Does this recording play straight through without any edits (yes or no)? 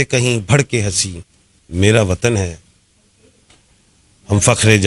yes